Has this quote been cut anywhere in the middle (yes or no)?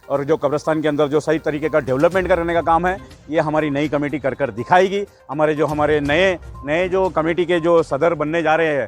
no